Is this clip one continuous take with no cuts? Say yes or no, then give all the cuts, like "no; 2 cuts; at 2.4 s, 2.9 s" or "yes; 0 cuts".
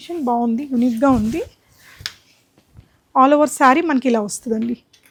yes; 0 cuts